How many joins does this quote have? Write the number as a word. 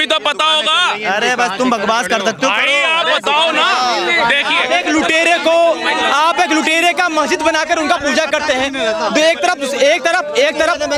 zero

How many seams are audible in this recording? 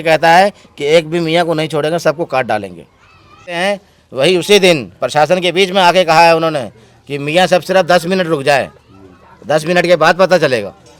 one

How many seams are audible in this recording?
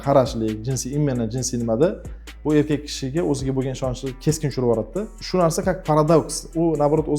one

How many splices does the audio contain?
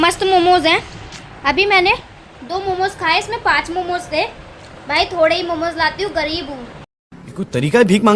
zero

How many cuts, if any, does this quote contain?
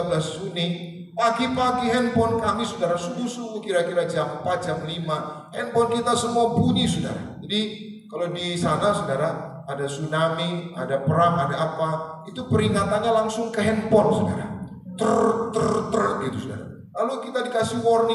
zero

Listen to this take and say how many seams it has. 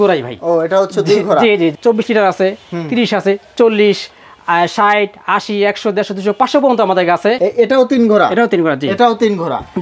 two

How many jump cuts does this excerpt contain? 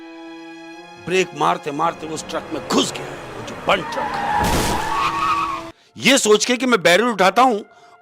one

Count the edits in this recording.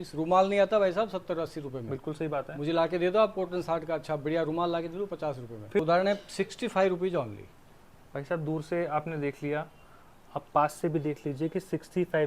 one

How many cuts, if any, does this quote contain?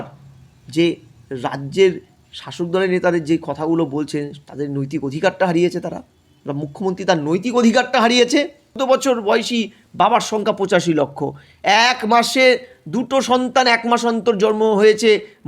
one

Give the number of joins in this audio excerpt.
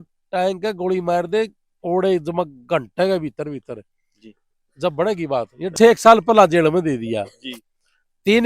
one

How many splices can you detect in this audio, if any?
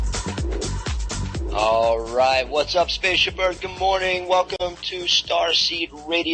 one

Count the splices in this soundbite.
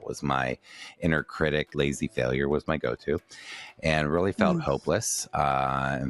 one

